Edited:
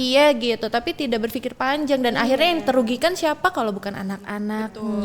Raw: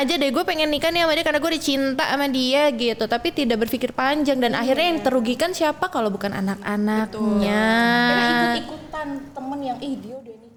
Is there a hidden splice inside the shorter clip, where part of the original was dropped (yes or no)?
no